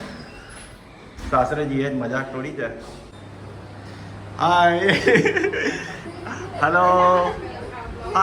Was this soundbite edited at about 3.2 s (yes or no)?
yes